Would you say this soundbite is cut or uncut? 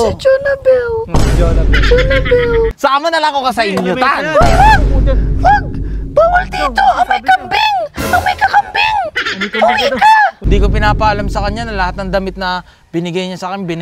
cut